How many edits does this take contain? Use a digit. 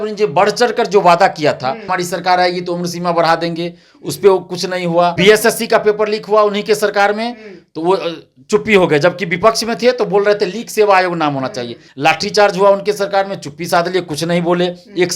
3